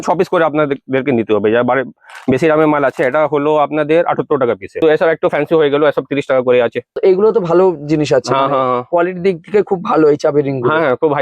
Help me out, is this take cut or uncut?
cut